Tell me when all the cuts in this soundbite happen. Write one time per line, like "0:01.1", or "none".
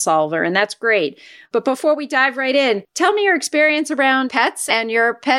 0:01.4
0:02.9
0:04.4